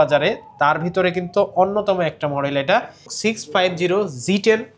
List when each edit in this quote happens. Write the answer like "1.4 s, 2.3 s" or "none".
3.1 s